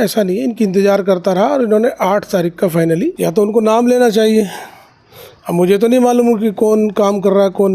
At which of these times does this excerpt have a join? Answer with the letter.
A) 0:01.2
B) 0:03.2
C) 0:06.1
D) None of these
B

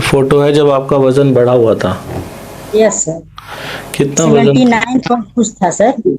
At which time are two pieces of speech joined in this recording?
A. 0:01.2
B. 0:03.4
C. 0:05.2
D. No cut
D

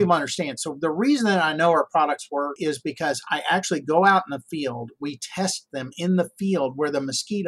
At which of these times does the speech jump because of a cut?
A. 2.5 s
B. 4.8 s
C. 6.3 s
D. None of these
A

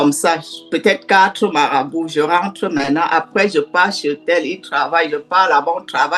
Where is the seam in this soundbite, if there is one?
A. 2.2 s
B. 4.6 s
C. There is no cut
C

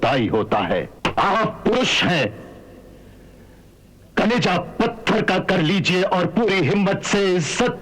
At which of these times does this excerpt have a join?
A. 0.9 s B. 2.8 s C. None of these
A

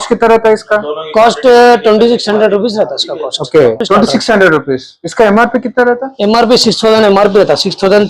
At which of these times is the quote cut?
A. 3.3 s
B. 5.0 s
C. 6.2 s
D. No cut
D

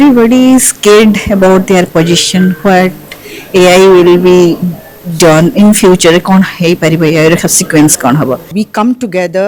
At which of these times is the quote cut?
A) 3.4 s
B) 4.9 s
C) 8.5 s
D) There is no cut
C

